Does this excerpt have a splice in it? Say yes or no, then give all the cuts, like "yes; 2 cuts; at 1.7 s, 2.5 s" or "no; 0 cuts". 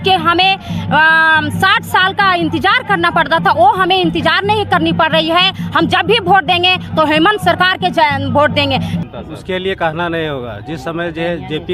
yes; 1 cut; at 9.0 s